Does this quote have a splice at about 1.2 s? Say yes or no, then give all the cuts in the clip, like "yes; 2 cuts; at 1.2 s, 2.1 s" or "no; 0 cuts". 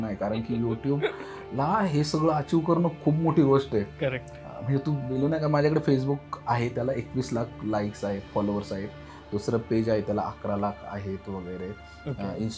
no; 0 cuts